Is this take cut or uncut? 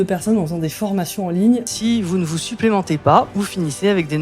cut